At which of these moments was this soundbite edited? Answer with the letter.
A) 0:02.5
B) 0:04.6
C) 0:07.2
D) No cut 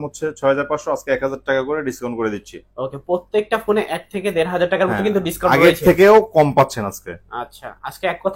D